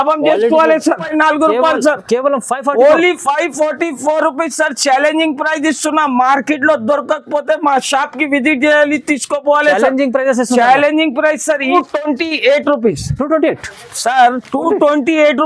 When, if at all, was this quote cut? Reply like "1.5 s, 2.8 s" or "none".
1.0 s, 11.7 s